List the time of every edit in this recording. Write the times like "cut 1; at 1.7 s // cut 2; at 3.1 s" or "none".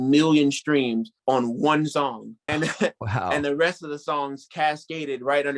cut 1; at 1.1 s // cut 2; at 2.3 s